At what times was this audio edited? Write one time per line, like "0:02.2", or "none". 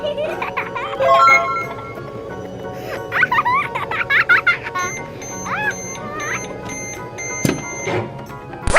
0:06.5